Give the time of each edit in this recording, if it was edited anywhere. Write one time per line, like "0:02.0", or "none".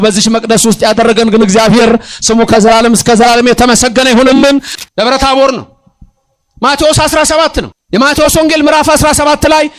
0:04.7
0:07.8